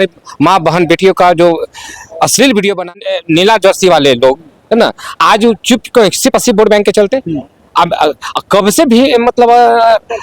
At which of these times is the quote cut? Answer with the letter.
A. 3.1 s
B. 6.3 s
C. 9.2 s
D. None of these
A